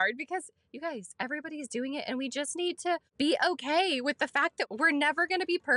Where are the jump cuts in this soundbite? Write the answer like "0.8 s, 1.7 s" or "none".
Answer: 3.1 s, 4.6 s